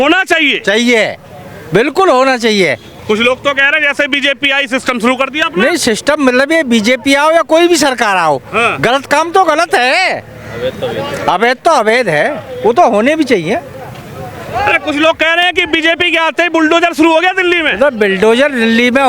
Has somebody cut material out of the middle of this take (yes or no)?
no